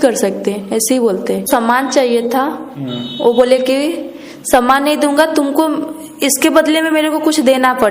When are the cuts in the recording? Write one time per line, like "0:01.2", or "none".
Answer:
0:01.5